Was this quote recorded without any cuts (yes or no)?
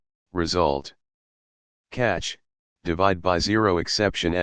yes